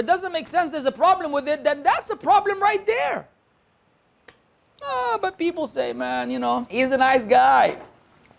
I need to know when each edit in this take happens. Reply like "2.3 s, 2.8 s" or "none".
6.7 s